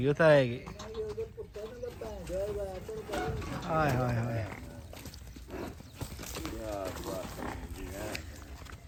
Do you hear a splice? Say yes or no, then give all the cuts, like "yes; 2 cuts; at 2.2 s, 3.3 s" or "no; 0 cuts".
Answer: no; 0 cuts